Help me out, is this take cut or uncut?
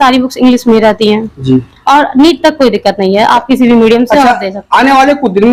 uncut